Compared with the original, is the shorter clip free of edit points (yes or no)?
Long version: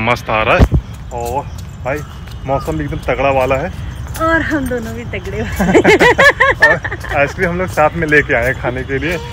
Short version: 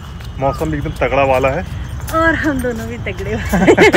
yes